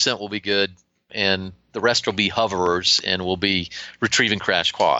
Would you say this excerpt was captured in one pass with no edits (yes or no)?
no